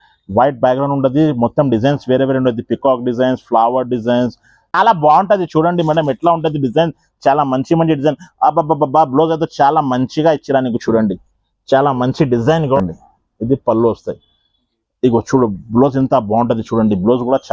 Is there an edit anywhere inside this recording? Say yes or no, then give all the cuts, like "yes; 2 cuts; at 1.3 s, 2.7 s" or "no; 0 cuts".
yes; 2 cuts; at 4.7 s, 12.8 s